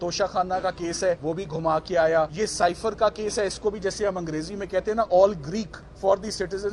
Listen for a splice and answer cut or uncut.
cut